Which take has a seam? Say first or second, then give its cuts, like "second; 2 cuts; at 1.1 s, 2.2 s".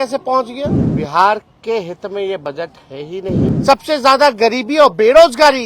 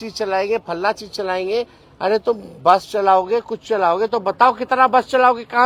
first; 2 cuts; at 0.9 s, 3.6 s